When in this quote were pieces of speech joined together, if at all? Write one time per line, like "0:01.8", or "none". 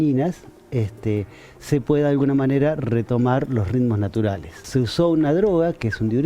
0:04.5